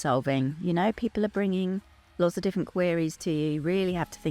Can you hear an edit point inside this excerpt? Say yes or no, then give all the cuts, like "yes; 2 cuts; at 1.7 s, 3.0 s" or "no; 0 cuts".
no; 0 cuts